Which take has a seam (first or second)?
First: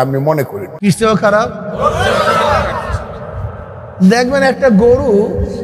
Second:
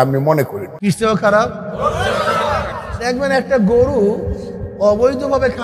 second